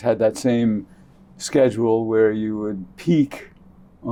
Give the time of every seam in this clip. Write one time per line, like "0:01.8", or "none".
none